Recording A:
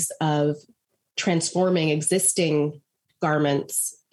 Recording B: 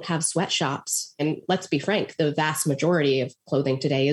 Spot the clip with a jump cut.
B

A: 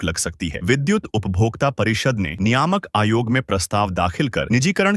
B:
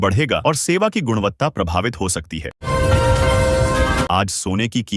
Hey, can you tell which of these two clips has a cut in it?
B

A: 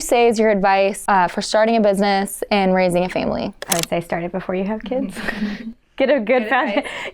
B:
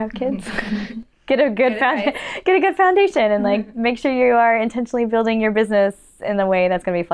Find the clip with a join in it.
A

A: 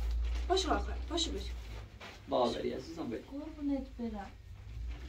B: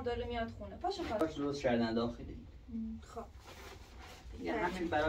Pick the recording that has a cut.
B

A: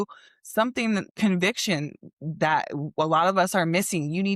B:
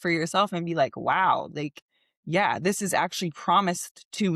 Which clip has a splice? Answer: A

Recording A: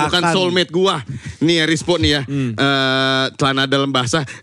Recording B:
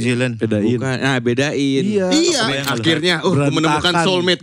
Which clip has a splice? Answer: B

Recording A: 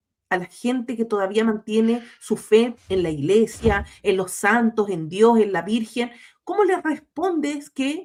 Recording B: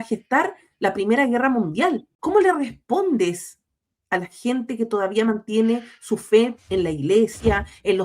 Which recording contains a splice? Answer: B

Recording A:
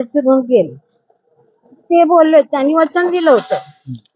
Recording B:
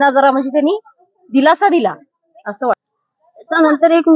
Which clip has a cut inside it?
B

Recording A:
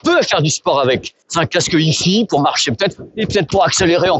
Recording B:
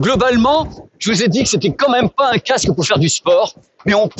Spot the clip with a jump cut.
A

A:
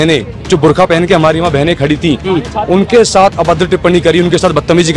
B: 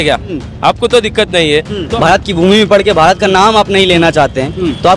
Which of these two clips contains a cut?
B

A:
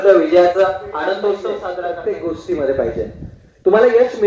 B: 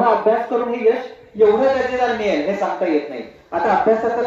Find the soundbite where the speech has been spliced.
A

